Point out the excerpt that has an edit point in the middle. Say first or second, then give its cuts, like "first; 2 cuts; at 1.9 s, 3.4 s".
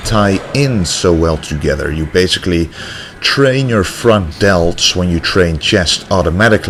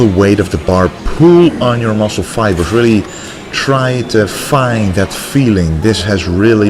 second; 1 cut; at 5.3 s